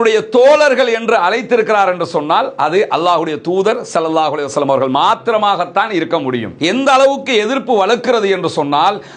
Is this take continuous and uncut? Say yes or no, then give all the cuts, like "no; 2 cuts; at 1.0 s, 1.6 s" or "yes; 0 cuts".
no; 1 cut; at 6.6 s